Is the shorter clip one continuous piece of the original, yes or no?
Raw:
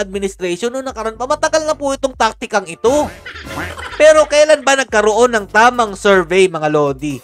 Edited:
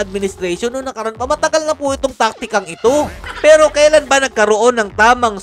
no